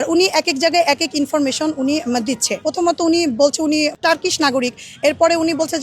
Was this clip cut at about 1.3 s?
no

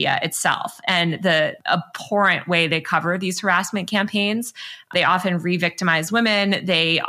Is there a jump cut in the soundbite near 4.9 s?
yes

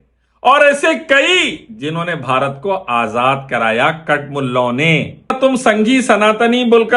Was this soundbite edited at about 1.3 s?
no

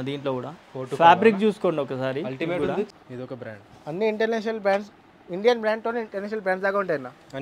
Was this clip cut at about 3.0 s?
yes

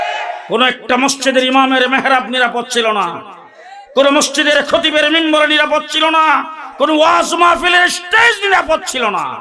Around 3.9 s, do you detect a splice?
no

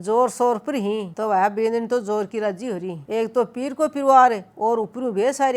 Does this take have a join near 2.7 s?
no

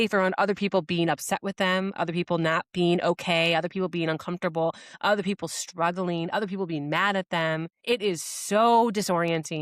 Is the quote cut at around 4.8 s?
no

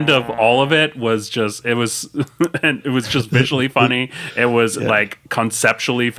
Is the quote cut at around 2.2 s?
no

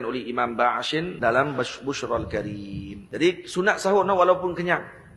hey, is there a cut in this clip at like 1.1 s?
yes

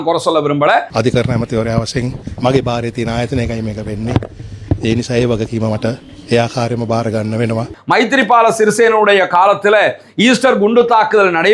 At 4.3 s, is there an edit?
no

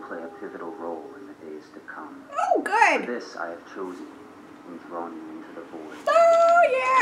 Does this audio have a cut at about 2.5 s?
no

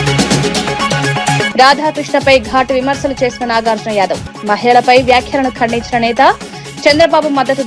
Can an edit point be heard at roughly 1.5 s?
yes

